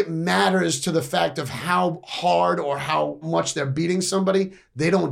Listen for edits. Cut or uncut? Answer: cut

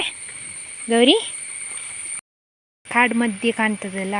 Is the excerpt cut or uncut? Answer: cut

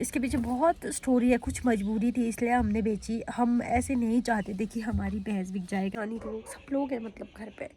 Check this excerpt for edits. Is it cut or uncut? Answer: cut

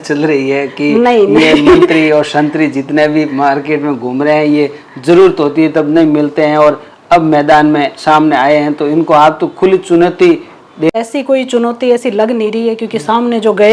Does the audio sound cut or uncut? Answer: cut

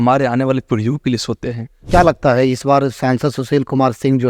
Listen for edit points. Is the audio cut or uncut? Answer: cut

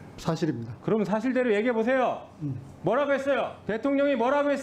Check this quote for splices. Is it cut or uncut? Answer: cut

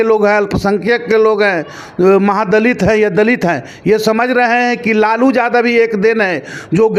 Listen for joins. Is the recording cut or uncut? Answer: uncut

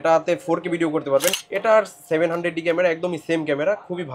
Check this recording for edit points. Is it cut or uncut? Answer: cut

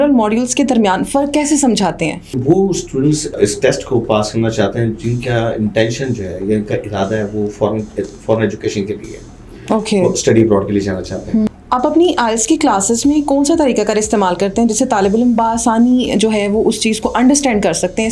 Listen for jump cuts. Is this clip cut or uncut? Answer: cut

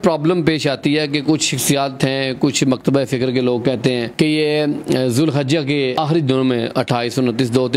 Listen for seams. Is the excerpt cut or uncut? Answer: uncut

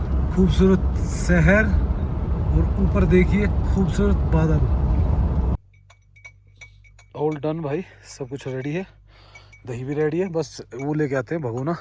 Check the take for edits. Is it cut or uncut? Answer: cut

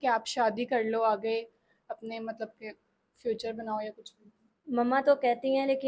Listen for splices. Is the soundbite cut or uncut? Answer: uncut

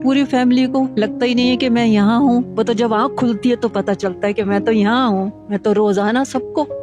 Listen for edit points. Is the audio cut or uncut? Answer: cut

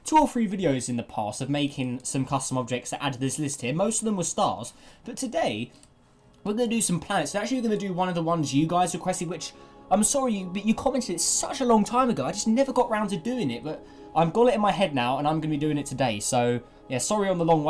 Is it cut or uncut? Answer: uncut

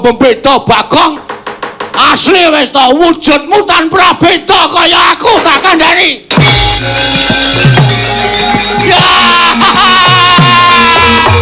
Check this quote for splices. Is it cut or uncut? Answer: cut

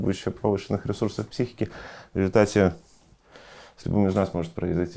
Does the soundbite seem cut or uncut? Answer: uncut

